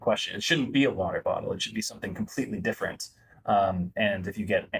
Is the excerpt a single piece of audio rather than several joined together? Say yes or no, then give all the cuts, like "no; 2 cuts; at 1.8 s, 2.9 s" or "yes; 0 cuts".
yes; 0 cuts